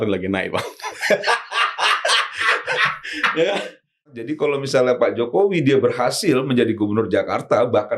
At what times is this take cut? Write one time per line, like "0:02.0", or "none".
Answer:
0:04.3